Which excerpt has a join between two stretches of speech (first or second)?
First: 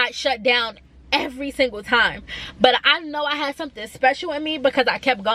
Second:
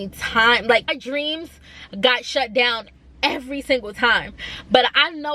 second